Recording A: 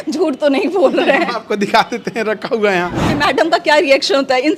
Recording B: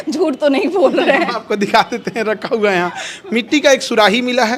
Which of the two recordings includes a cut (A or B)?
A